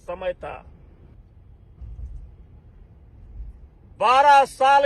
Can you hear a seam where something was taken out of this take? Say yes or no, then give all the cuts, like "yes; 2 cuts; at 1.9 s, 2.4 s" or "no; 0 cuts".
yes; 1 cut; at 1.1 s